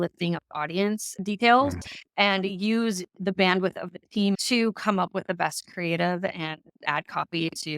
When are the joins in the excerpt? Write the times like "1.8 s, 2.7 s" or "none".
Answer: 4.4 s

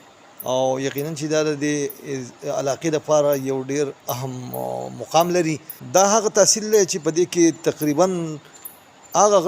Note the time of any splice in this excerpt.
5.7 s

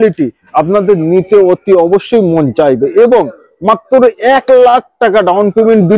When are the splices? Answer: none

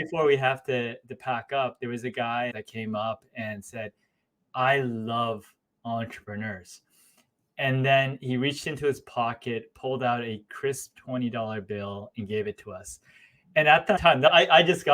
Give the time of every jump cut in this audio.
2.5 s, 14.1 s

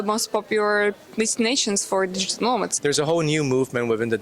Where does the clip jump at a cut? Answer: 2.7 s

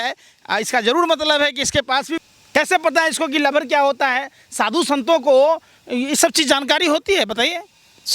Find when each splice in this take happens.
2.3 s

